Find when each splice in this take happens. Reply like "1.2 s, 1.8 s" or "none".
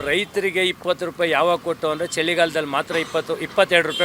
none